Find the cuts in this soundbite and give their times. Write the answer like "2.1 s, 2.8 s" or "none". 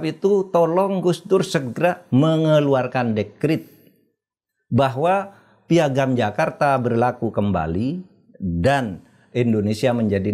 none